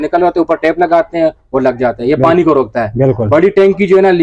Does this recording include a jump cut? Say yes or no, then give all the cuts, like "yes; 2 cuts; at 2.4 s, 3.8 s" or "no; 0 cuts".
no; 0 cuts